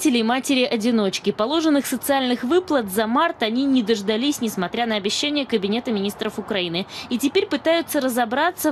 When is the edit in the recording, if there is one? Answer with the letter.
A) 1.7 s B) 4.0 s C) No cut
B